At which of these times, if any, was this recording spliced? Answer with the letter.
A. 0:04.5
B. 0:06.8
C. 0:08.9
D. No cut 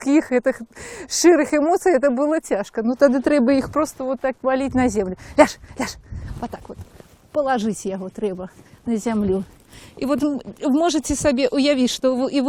B